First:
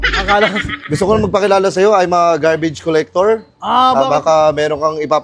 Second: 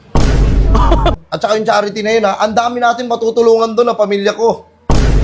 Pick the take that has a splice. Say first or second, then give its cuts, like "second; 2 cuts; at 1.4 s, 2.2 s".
second; 1 cut; at 1.1 s